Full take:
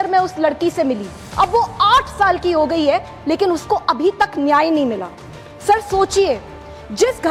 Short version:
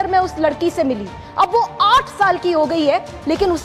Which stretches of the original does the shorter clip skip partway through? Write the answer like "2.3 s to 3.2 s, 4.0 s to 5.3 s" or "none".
none